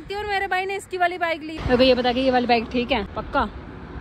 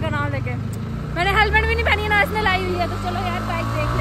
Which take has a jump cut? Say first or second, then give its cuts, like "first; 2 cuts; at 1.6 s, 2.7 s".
first; 2 cuts; at 1.5 s, 3.1 s